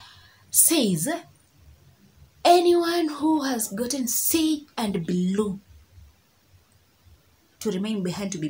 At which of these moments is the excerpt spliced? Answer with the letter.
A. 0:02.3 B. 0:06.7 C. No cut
C